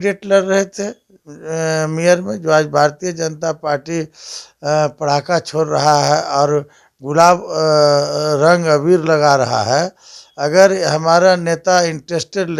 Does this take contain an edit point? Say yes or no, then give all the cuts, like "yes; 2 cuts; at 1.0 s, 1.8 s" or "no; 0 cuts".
no; 0 cuts